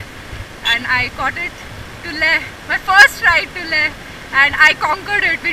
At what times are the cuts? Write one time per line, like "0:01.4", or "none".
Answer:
none

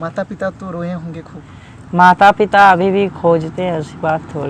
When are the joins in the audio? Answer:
none

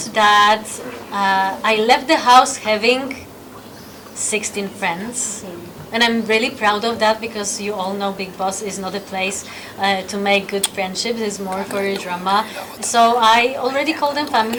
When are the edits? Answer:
none

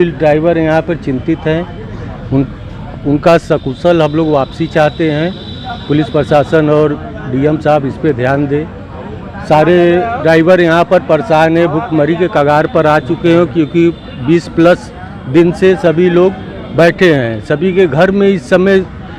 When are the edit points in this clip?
none

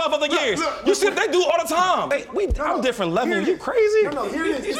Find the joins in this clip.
0:02.1

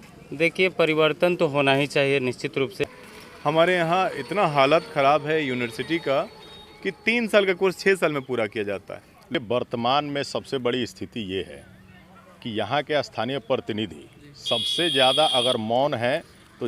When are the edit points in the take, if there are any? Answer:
0:02.8
0:09.3

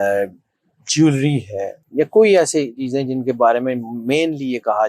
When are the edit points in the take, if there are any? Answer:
0:01.8

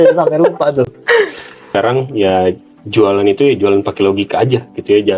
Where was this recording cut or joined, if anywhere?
0:01.7

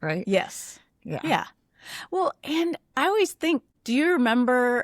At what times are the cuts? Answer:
0:03.7

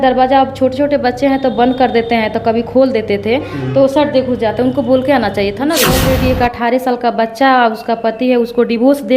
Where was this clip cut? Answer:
0:05.9

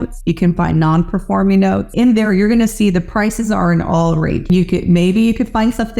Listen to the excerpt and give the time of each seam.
0:01.9

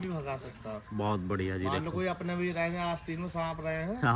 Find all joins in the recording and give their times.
none

